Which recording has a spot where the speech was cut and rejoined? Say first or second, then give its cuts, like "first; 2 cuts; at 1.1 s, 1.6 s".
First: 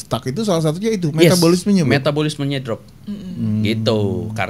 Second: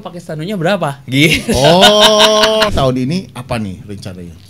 second; 1 cut; at 2.7 s